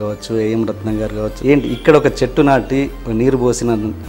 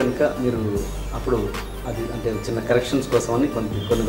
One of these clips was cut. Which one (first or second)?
first